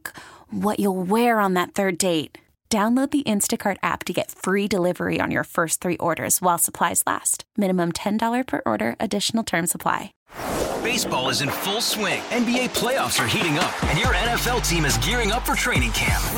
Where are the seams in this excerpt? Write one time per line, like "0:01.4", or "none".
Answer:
0:10.1

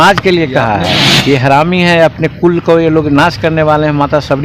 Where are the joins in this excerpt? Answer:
0:01.1

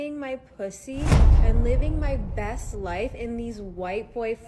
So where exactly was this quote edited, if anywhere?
none

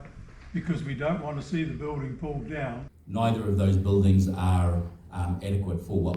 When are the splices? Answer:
0:02.9

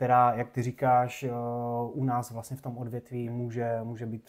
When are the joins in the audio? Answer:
none

